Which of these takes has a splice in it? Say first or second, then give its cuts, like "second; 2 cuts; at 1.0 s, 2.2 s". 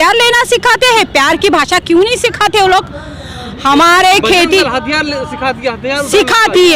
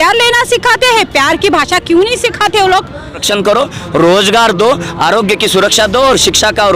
second; 1 cut; at 3.3 s